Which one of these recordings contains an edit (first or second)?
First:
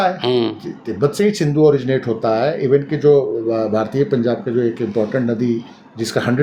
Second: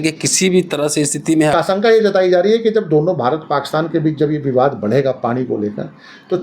second